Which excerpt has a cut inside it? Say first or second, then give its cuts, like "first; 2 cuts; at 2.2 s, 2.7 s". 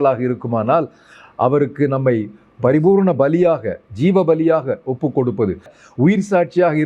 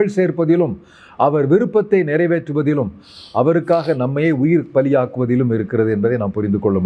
first; 1 cut; at 5.7 s